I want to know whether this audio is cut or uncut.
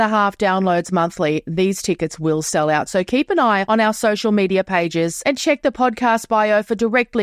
uncut